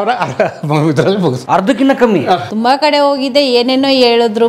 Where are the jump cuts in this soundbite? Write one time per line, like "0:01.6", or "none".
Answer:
0:01.4
0:02.5